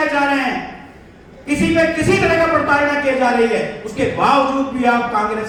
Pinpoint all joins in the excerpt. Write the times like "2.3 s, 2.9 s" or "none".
none